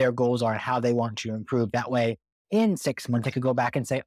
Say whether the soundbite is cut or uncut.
uncut